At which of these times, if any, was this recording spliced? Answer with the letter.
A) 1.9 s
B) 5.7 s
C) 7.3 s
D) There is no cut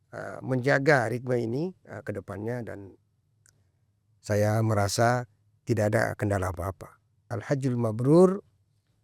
C